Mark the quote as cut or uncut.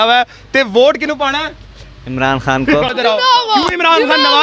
cut